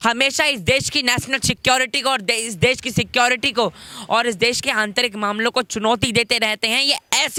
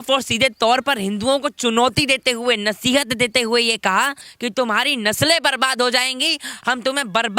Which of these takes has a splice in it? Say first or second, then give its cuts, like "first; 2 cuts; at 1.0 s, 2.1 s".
second; 1 cut; at 4.2 s